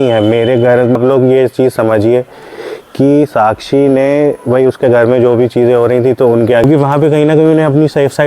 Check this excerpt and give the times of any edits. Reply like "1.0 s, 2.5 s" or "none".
1.0 s, 6.6 s